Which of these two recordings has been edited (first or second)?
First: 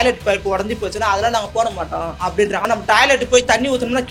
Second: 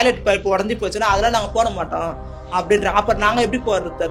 first